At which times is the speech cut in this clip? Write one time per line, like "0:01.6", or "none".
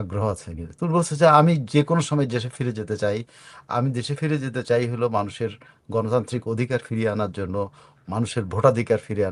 none